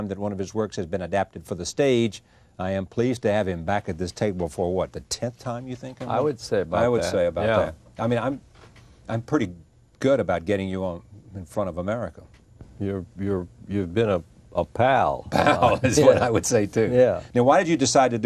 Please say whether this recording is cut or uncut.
cut